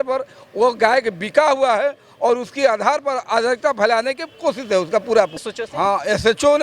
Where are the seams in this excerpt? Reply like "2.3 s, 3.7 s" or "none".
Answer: 5.4 s